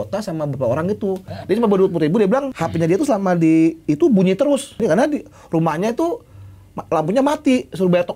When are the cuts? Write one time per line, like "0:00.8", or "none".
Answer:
0:01.3
0:02.6
0:04.8